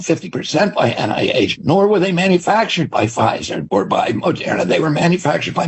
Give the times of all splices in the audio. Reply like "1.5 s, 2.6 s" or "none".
1.6 s